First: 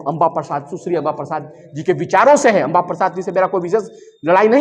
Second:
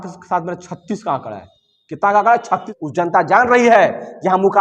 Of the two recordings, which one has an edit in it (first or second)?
second